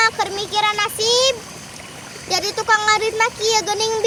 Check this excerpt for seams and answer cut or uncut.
uncut